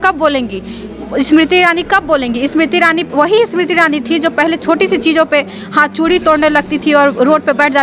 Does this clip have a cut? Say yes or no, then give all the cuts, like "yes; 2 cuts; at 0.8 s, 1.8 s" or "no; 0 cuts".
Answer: no; 0 cuts